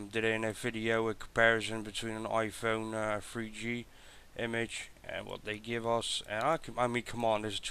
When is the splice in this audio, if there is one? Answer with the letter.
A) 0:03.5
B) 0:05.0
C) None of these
C